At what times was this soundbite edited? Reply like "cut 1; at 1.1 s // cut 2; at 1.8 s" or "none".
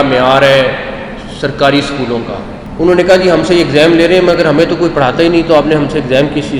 cut 1; at 2.6 s